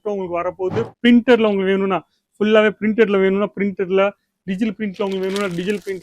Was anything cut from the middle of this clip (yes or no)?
yes